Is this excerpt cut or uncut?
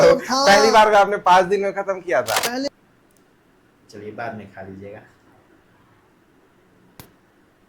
cut